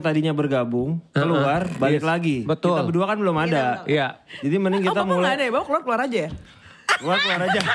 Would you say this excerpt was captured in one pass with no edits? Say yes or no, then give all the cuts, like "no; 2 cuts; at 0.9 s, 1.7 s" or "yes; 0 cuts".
yes; 0 cuts